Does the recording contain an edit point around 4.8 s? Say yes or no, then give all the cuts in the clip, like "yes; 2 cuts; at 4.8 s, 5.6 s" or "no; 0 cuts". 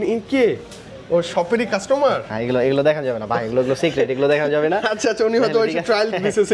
no; 0 cuts